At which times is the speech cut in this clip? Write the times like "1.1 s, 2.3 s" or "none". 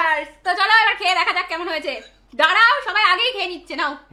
none